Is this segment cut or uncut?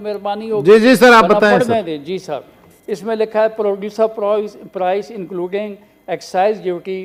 uncut